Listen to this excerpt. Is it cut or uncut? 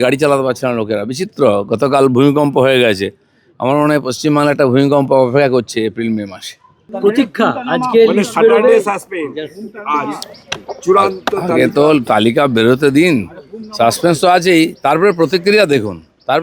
cut